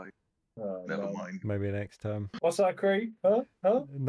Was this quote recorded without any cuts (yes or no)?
no